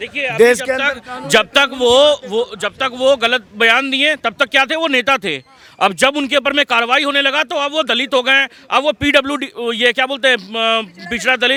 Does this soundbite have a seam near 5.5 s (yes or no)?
no